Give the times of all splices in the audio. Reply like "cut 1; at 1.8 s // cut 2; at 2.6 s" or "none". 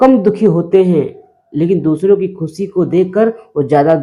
none